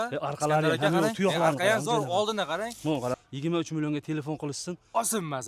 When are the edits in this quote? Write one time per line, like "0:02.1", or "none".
0:03.2